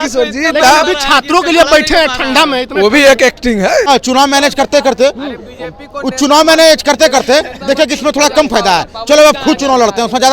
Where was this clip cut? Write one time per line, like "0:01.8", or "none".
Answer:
0:03.9

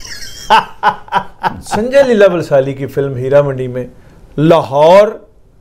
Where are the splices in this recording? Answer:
0:01.7

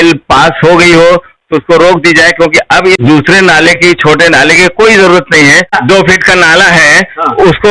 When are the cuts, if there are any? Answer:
0:03.0
0:05.8

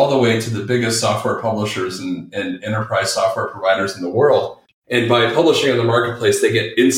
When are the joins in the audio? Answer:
0:04.6

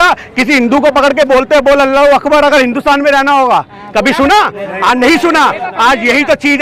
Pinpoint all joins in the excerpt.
none

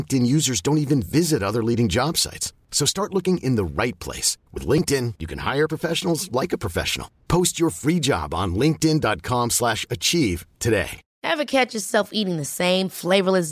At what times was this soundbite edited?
none

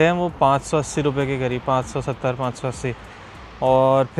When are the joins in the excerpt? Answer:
none

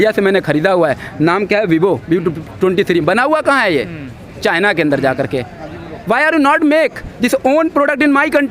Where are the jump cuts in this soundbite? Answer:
none

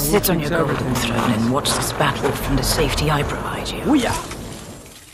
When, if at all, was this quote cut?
0:03.8

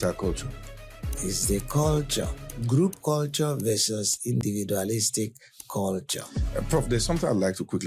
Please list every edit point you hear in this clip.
0:02.6

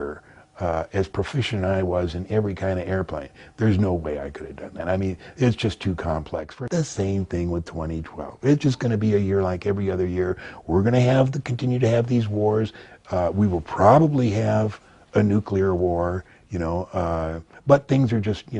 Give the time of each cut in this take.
0:06.5

